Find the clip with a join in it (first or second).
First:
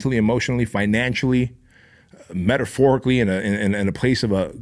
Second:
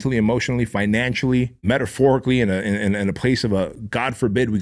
second